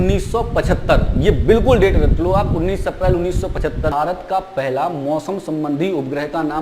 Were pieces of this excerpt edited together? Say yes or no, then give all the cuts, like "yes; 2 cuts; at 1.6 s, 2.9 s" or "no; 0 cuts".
yes; 1 cut; at 3.9 s